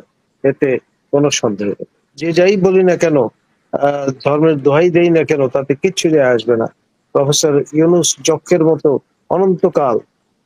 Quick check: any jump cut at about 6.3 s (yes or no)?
no